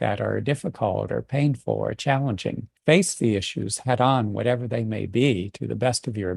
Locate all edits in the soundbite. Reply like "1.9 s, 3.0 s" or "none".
2.7 s